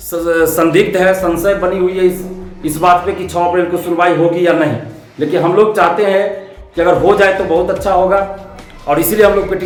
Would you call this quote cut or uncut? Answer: uncut